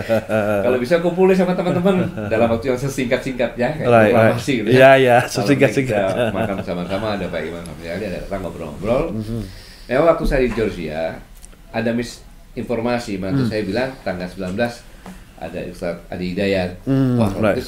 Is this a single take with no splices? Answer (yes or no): yes